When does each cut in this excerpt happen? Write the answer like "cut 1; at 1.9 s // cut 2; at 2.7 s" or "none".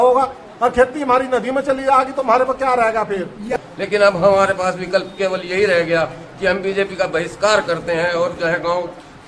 cut 1; at 3.5 s